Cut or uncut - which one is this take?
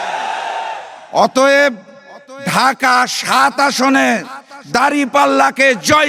uncut